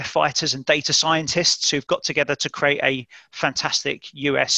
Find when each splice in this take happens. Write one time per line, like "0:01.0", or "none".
none